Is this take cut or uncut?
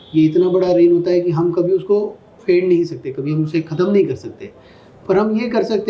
cut